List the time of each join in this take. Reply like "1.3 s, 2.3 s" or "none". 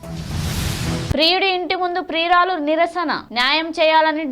1.1 s